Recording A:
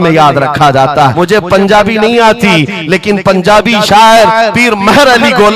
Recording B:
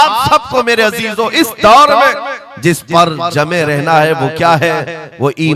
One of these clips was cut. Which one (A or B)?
A